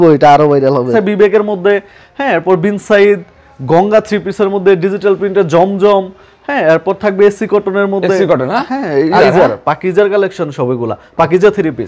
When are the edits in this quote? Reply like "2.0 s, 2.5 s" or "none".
0.9 s, 9.2 s